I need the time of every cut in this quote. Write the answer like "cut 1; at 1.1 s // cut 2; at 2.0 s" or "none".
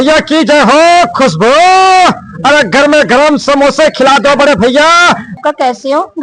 cut 1; at 5.3 s